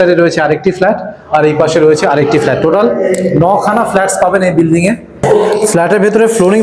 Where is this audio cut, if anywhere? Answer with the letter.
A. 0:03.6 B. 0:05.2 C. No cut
B